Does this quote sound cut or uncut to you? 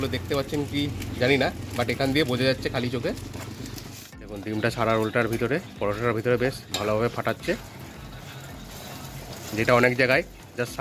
cut